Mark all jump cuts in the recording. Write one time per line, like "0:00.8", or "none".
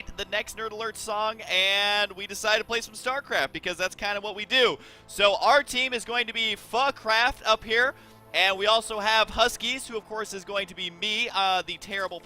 0:01.2